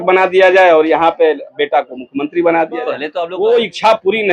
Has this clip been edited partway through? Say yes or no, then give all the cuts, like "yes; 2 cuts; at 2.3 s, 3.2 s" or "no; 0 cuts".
yes; 1 cut; at 3.0 s